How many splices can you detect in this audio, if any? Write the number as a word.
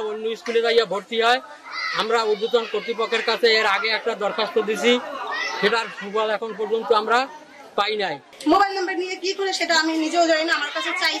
one